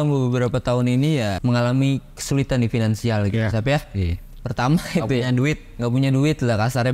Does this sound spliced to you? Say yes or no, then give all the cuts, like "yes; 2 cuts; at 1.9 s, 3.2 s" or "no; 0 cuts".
yes; 1 cut; at 1.4 s